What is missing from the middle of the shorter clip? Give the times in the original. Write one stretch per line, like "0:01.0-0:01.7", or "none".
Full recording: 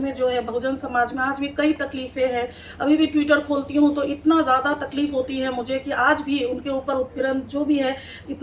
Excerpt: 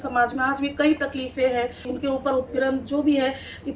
0:02.7-0:06.6